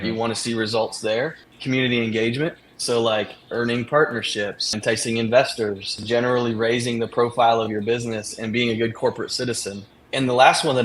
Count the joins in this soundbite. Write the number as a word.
three